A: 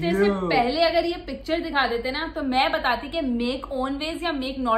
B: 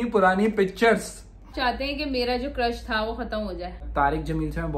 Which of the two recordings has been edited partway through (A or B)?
B